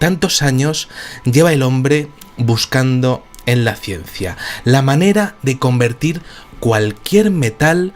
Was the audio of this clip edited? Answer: yes; 1 cut; at 5.2 s

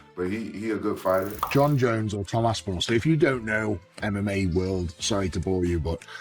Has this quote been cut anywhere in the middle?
yes; 1 cut; at 1.4 s

